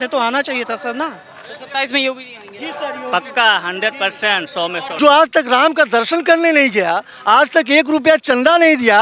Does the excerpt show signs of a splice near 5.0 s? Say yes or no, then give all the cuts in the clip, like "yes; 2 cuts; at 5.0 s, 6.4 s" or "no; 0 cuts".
yes; 1 cut; at 5.0 s